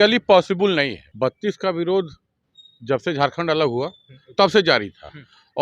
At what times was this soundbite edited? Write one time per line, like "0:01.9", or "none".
0:01.0